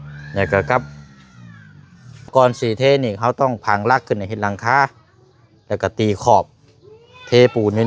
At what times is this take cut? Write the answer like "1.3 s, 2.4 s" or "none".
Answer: 2.3 s